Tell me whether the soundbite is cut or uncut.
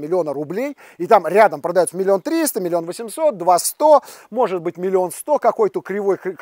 uncut